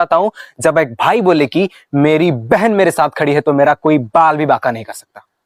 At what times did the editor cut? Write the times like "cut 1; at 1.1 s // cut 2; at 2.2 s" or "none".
none